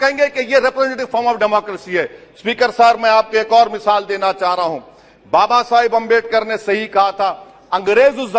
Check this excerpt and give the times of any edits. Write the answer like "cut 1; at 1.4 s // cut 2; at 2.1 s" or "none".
none